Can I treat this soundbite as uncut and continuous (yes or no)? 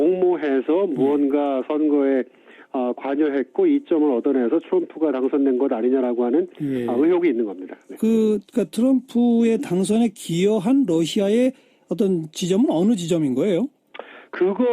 no